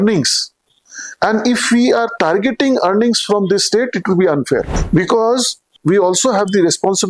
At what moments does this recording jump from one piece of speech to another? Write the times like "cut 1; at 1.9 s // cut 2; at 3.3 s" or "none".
cut 1; at 4.8 s // cut 2; at 5.8 s